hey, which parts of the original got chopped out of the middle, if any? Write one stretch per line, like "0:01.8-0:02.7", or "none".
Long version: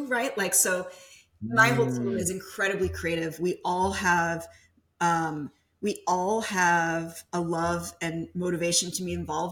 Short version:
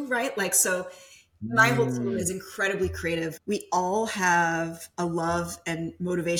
0:03.3-0:05.7

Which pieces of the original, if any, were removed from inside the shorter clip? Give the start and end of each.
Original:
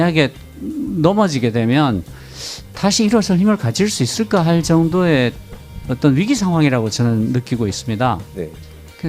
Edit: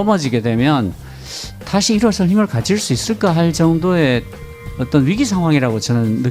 none

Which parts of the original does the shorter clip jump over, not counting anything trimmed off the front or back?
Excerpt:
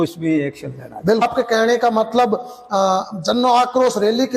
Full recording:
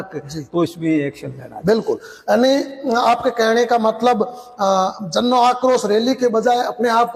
0:01.8-0:03.1

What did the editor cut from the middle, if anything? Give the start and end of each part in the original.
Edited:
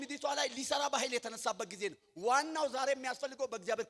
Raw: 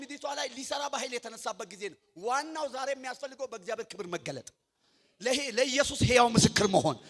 none

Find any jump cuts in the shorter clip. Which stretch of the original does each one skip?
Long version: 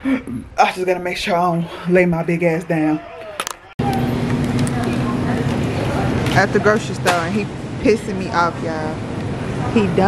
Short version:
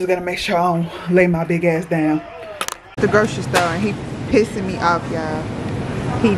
0:03.8-0:06.5

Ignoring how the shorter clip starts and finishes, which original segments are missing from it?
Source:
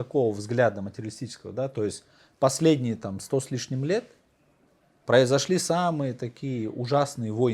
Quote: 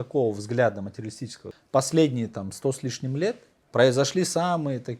0:01.4-0:02.1
0:04.2-0:04.9

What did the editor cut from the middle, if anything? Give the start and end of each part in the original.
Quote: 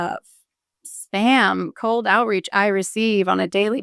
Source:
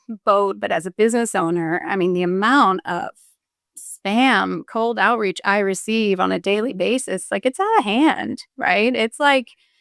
none

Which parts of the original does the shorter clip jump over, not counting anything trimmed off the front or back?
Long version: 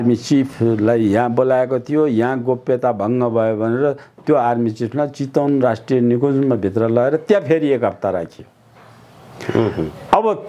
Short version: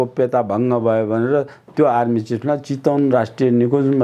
none

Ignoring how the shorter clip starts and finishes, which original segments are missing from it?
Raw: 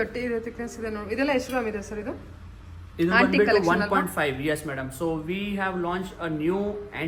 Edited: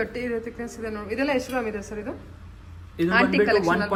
none

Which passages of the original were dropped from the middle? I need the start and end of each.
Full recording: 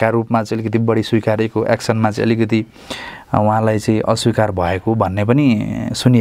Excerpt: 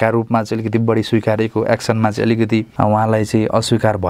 0:02.7-0:03.2

